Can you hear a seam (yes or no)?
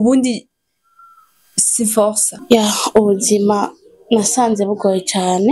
yes